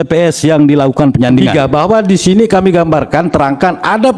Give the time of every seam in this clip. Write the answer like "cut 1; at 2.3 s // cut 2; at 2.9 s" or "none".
cut 1; at 1.9 s